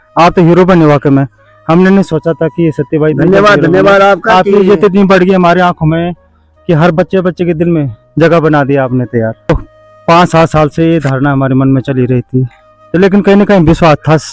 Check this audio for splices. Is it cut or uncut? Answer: cut